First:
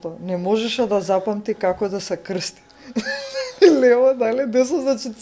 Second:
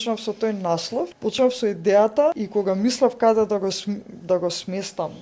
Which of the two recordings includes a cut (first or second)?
second